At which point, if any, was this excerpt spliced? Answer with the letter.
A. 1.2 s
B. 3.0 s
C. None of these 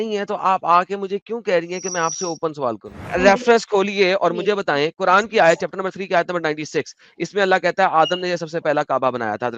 B